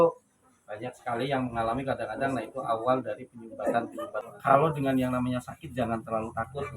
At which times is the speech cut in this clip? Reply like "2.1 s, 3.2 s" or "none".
4.2 s